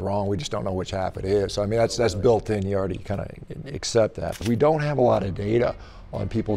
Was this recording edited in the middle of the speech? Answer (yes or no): yes